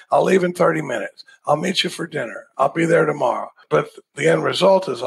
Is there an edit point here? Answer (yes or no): yes